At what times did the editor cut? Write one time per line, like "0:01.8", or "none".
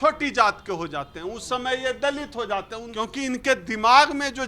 0:02.8